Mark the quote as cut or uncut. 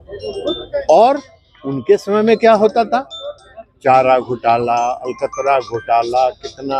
uncut